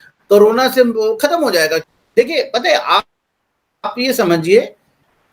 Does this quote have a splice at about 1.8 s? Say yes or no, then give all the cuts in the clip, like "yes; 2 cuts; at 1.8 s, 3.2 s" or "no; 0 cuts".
yes; 1 cut; at 1.8 s